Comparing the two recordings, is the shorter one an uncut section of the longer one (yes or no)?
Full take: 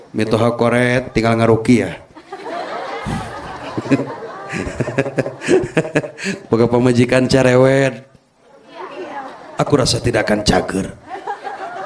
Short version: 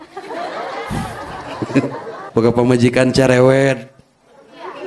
no